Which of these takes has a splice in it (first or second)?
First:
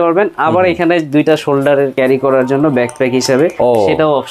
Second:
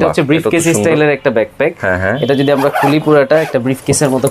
first